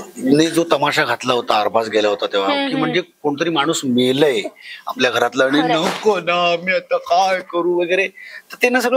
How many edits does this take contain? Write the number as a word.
zero